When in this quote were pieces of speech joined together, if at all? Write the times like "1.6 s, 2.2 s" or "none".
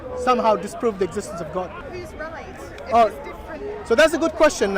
1.9 s